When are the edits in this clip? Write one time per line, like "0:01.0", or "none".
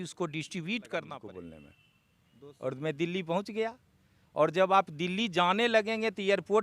0:01.2